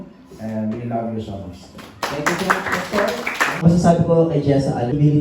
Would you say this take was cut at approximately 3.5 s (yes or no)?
yes